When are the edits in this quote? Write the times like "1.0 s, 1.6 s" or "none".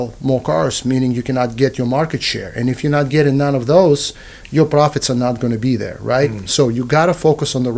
none